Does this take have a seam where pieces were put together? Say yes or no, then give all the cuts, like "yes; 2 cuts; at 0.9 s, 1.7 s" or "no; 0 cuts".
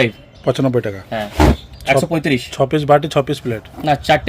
yes; 1 cut; at 1.6 s